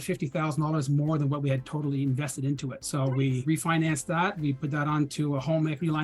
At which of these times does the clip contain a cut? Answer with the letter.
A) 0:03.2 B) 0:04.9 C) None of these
A